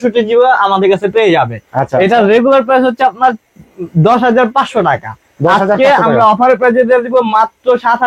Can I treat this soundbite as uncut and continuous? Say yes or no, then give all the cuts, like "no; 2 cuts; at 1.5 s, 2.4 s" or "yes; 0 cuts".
yes; 0 cuts